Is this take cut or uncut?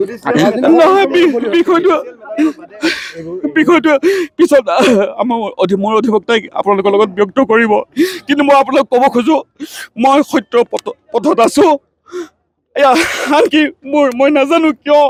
uncut